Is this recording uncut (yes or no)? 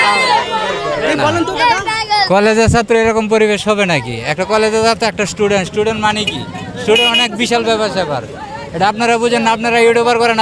yes